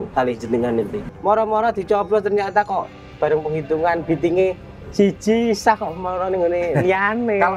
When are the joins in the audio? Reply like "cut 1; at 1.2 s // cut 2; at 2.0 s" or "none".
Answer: cut 1; at 1.0 s